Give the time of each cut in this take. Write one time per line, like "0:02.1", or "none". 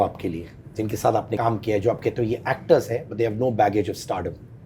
0:01.3